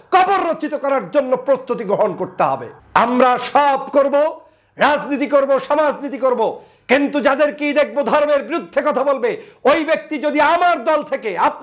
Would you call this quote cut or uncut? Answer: cut